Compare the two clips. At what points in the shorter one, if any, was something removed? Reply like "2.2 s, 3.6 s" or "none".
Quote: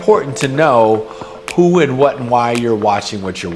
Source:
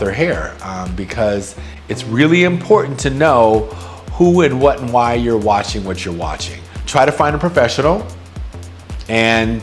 none